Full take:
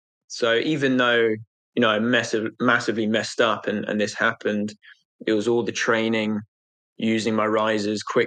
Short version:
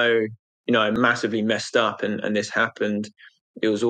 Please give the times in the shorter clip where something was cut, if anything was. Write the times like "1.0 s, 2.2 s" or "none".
1.0 s